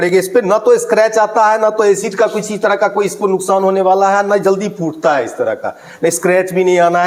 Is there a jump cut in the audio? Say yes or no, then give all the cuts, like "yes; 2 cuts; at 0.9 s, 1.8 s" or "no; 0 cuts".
no; 0 cuts